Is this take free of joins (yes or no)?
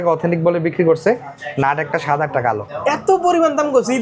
no